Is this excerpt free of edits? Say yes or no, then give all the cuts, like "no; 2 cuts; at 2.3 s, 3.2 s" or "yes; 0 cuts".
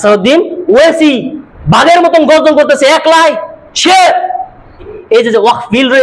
no; 1 cut; at 5.0 s